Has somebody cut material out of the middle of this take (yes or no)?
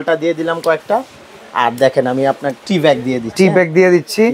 yes